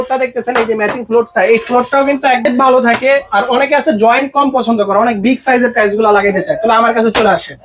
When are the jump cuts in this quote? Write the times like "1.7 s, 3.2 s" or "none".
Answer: 2.4 s